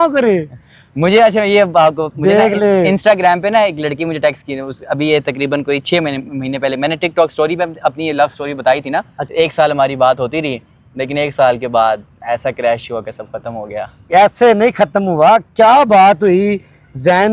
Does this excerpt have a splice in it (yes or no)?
yes